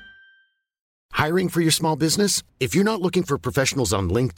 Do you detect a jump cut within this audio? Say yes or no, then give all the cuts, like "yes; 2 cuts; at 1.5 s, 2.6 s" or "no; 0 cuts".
yes; 1 cut; at 1.0 s